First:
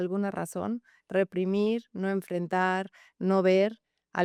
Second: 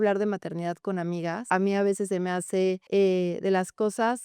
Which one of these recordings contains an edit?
second; 2 cuts; at 1.4 s, 2.8 s

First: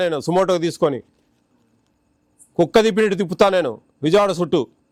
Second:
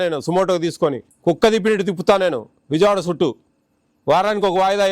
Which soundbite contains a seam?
second; 1 cut; at 1.1 s

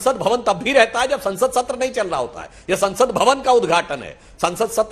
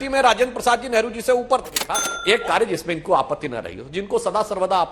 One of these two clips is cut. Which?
second; 1 cut; at 2.1 s

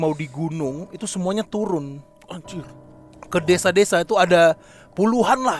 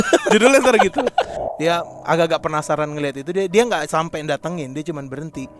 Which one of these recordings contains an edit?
second; 1 cut; at 1.3 s

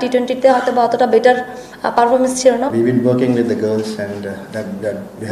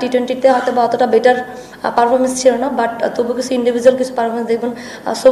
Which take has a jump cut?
first; 1 cut; at 2.7 s

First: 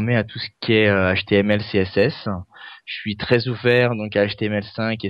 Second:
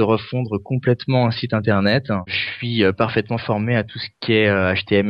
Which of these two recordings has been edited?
second; 1 cut; at 2.3 s

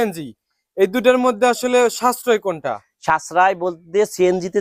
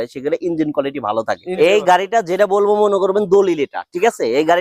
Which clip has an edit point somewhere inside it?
second; 1 cut; at 1.6 s

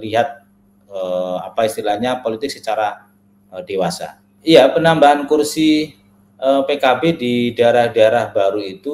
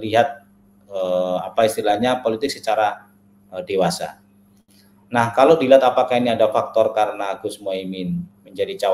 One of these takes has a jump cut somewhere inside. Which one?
first; 1 cut; at 4.2 s

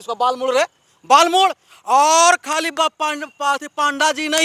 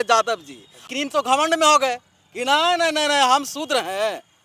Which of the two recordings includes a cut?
second; 1 cut; at 0.9 s

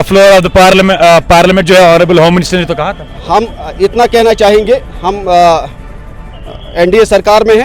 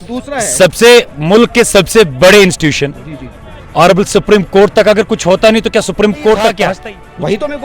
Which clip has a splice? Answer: second; 1 cut; at 6.7 s

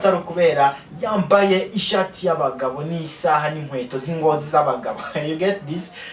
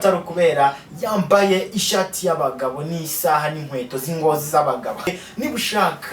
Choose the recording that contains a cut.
second; 1 cut; at 5.1 s

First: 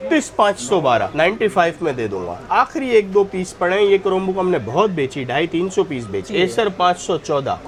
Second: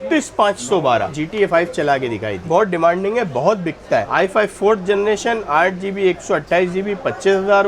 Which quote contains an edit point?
second; 3 cuts; at 1.1 s, 2.4 s, 4.1 s

